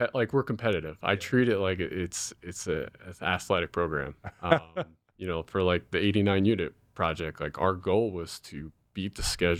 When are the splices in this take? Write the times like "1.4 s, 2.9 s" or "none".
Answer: none